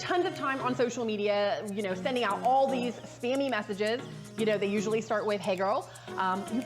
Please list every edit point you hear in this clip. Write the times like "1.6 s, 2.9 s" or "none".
3.6 s